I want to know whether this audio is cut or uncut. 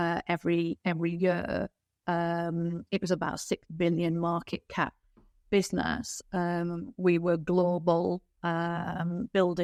uncut